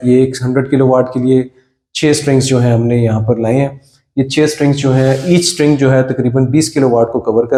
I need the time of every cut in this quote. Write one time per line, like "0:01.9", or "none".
none